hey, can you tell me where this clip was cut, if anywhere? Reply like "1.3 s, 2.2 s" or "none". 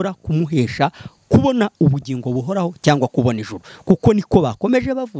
none